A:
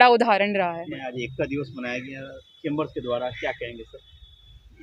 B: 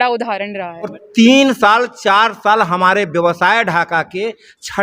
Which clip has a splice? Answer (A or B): B